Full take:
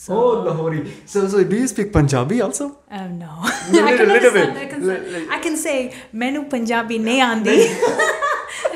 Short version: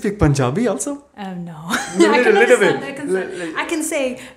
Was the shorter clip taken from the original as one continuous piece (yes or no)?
yes